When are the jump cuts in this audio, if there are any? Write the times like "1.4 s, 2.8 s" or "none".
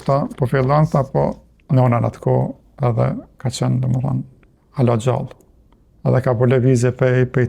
1.5 s